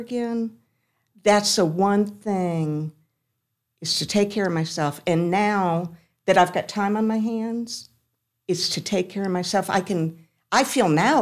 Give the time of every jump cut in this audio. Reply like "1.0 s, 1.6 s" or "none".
none